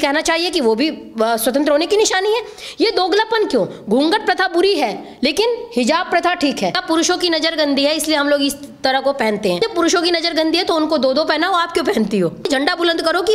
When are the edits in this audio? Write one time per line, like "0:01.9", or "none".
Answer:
0:06.8
0:09.6
0:12.5